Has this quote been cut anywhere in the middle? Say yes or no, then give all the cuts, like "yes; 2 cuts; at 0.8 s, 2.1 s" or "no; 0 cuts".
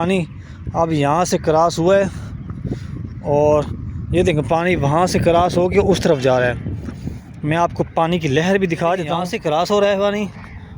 yes; 1 cut; at 9.3 s